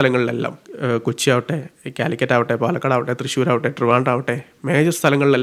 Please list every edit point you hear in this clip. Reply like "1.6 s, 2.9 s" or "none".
none